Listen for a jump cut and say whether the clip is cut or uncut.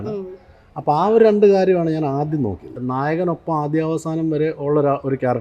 cut